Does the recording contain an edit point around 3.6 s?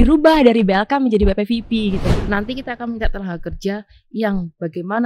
no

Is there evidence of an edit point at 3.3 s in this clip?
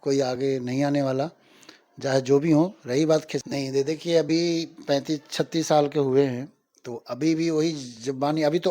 yes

